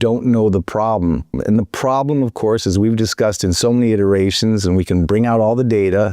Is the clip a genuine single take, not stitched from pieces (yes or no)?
no